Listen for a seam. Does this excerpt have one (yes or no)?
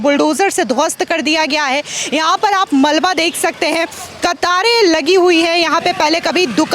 no